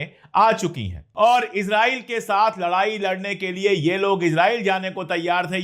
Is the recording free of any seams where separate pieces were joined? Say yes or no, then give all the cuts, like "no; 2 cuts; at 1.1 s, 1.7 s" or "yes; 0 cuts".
no; 1 cut; at 1.0 s